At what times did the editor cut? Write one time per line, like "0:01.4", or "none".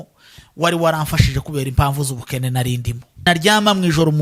0:03.3